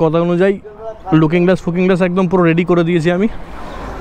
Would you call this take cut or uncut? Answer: uncut